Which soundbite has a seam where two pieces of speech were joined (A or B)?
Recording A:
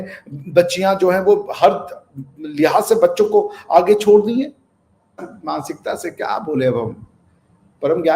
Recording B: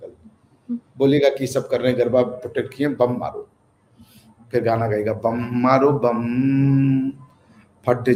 A